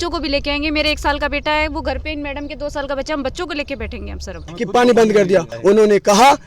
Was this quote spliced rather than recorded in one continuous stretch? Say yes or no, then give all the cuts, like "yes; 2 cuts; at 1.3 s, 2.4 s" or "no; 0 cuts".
yes; 2 cuts; at 4.5 s, 5.5 s